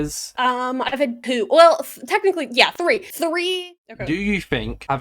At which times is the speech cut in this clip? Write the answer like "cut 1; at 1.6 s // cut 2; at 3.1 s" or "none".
cut 1; at 3.7 s